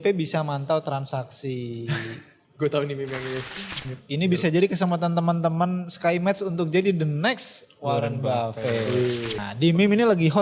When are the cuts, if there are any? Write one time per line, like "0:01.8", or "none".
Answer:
0:03.8
0:09.4